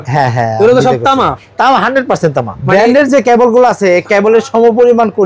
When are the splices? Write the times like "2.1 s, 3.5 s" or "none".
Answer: 2.6 s